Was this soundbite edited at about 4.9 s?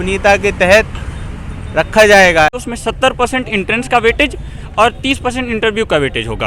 no; 1 cut; at 2.6 s

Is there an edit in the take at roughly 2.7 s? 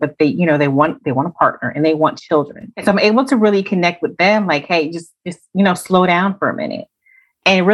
yes; 1 cut; at 2.7 s

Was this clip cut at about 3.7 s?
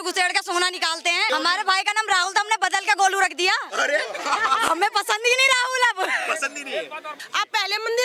no; 2 cuts; at 1.3 s, 7.2 s

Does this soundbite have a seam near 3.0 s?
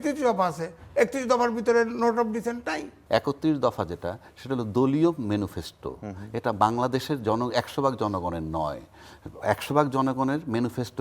yes; 1 cut; at 3.0 s

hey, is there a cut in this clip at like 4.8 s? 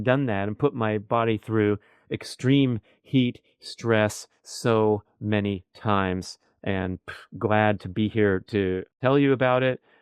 no; 1 cut; at 8.9 s

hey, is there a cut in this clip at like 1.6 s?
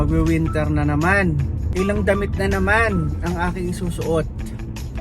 yes; 1 cut; at 1.6 s

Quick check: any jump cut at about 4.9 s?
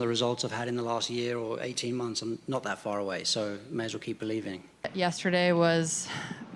yes; 1 cut; at 4.9 s

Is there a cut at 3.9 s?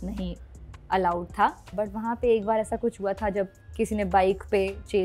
no; 1 cut; at 1.6 s

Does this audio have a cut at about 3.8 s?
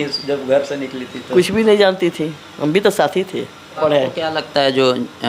yes; 1 cut; at 3.8 s

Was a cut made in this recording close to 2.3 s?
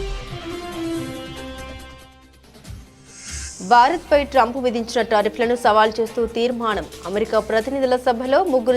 no; 1 cut; at 3.5 s

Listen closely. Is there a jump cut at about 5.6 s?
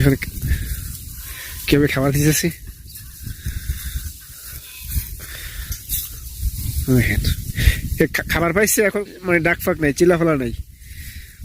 no; 1 cut; at 9.0 s

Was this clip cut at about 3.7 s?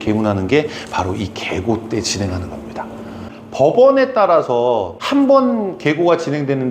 no; 1 cut; at 4.9 s

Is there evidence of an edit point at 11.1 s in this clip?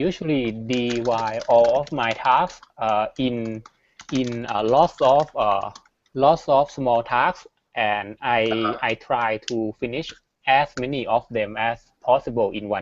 yes; 1 cut; at 11.1 s

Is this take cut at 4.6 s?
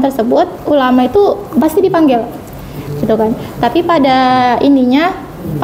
no; 0 cuts

